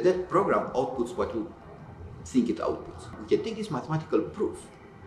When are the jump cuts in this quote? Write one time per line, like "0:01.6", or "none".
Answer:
0:03.1